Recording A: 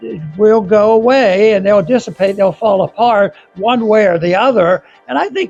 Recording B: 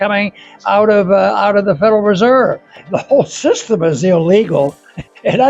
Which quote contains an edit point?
B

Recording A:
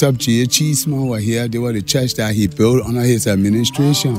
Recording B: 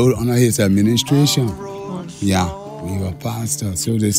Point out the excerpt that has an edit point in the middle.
B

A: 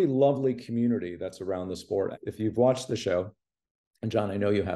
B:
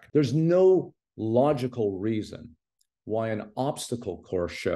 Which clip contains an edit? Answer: A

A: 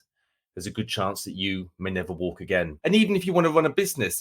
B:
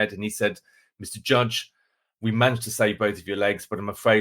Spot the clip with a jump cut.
A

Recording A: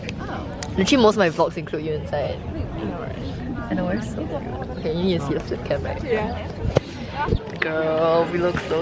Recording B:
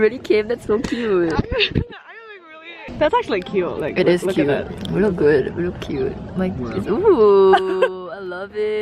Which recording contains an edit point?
B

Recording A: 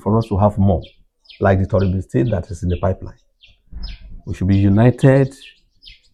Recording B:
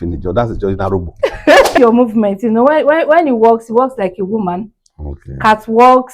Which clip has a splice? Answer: B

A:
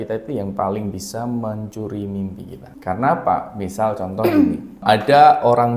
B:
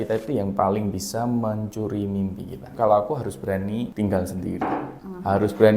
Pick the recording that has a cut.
B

